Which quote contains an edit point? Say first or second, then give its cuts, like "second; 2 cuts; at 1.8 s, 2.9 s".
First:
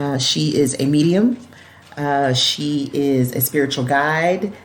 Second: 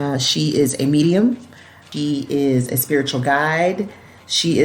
second; 1 cut; at 1.8 s